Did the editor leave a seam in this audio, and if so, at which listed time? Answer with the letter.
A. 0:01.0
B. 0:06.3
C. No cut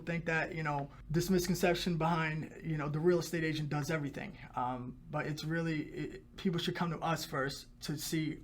A